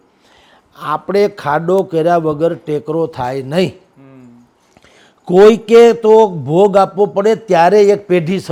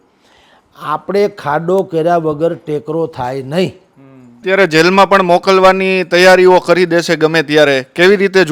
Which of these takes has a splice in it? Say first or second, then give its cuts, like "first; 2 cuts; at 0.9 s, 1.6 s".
second; 1 cut; at 4.3 s